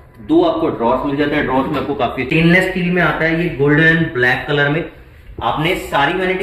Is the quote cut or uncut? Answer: cut